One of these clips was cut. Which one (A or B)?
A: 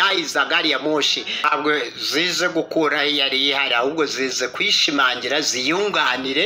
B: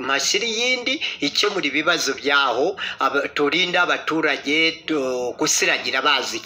A